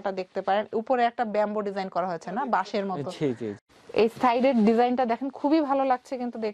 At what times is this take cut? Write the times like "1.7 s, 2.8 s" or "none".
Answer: 3.7 s